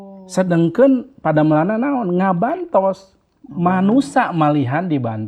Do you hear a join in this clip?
no; 0 cuts

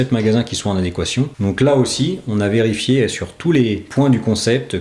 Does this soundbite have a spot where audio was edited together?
yes; 2 cuts; at 1.3 s, 3.9 s

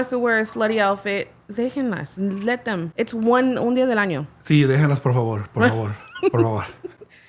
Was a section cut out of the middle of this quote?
yes; 1 cut; at 2.9 s

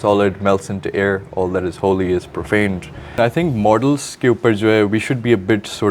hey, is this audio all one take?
no; 1 cut; at 3.2 s

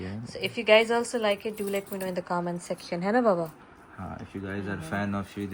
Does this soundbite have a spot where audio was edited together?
no; 0 cuts

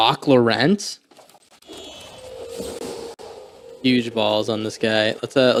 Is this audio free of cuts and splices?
yes; 0 cuts

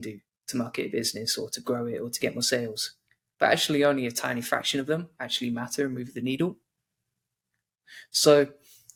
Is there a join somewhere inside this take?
no; 0 cuts

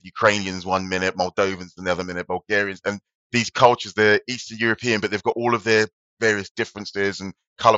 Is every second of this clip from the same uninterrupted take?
yes; 0 cuts

